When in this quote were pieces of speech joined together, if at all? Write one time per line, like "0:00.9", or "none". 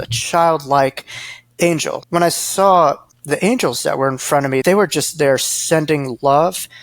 0:02.0
0:04.6